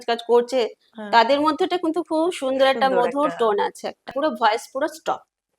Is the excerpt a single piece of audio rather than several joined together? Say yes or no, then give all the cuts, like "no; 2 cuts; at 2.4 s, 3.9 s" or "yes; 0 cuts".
no; 1 cut; at 4.1 s